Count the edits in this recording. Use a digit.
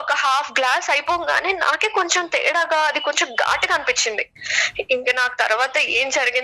1